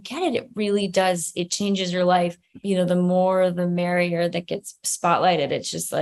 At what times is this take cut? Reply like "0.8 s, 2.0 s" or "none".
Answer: 2.5 s

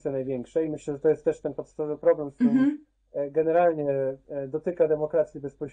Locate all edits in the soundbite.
none

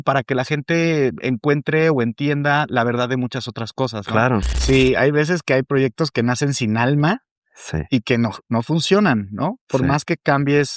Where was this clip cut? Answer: 4.5 s

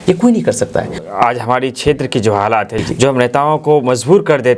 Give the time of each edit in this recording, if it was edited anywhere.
0.9 s, 2.8 s

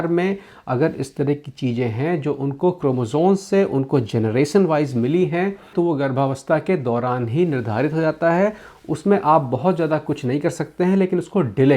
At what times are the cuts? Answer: none

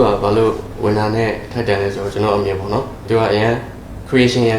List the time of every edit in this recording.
3.0 s

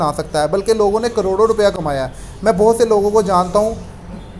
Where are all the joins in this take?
none

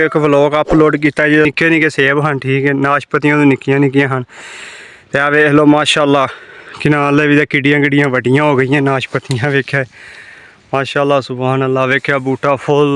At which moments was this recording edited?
1.5 s

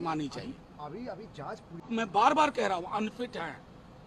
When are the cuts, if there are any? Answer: 1.9 s

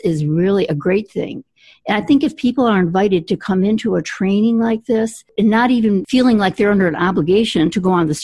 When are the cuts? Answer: 5.3 s, 6.1 s

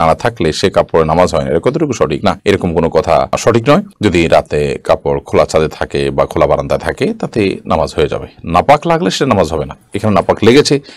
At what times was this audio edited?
none

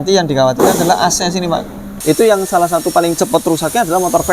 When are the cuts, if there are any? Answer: 1.9 s

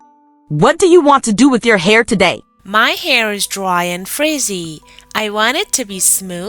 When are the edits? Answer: 2.5 s

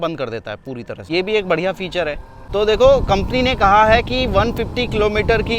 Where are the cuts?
none

